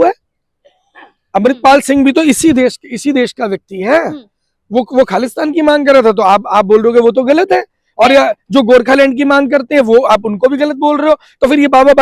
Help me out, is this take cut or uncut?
uncut